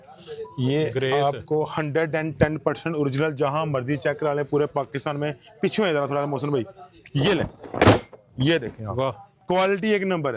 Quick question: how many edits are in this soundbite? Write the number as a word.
zero